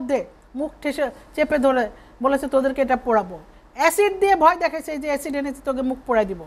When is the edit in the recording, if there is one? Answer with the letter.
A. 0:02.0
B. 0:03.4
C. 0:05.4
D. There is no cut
D